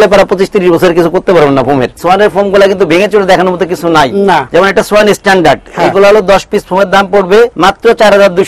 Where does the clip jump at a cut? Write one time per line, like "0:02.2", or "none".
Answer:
0:02.0
0:04.5
0:07.5